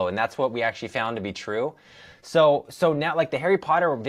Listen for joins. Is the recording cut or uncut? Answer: uncut